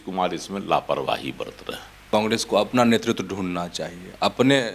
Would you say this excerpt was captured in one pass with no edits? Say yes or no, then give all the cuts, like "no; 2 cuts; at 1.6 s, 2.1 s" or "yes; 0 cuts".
no; 1 cut; at 2.0 s